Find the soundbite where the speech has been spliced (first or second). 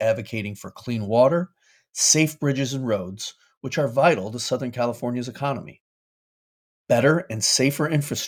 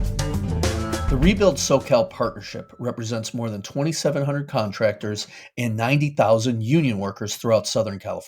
second